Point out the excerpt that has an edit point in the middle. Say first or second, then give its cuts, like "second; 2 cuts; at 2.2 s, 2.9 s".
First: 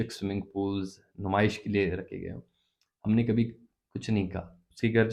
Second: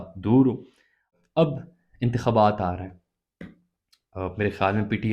second; 1 cut; at 1.1 s